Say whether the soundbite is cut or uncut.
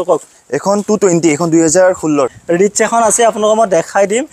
cut